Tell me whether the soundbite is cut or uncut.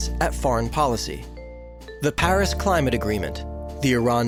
uncut